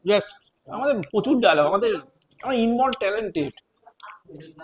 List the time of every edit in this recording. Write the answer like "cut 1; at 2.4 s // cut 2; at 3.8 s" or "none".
none

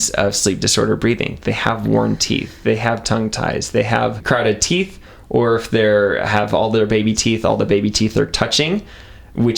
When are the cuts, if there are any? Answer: cut 1; at 4.2 s

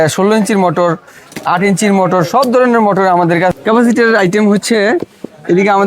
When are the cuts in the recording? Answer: cut 1; at 3.5 s

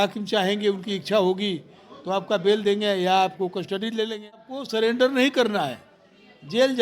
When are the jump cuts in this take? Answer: cut 1; at 4.9 s

